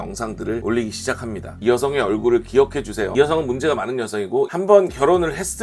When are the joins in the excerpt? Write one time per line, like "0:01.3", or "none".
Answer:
0:01.5